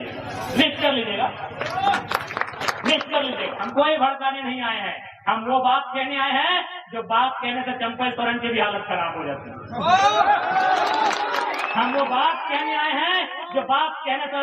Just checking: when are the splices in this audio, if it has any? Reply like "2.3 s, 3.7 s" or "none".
3.7 s